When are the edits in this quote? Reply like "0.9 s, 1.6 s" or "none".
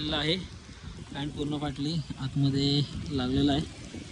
none